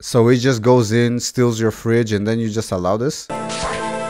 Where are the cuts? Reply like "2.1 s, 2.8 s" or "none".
none